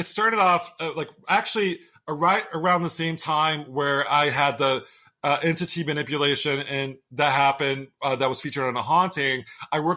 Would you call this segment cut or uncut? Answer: uncut